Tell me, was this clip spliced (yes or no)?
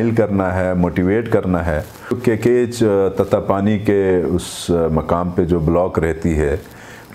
yes